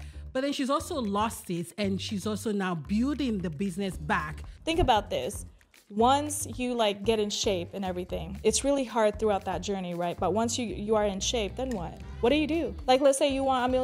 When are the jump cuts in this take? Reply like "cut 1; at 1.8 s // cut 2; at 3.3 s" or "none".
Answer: cut 1; at 4.5 s // cut 2; at 12.0 s // cut 3; at 12.7 s